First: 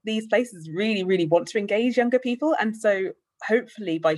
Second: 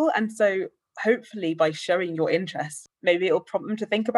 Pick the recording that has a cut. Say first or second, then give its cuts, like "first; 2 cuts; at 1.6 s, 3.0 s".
second; 1 cut; at 2.8 s